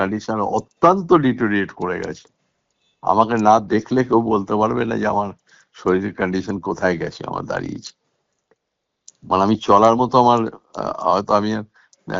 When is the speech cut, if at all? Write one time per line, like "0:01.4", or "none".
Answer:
none